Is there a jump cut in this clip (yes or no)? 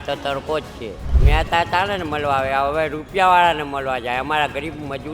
yes